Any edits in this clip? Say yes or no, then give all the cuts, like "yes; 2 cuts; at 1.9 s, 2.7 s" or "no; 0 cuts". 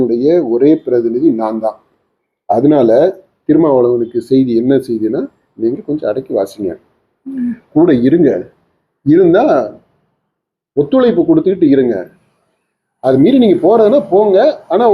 no; 0 cuts